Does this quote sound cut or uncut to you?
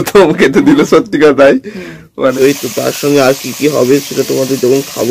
cut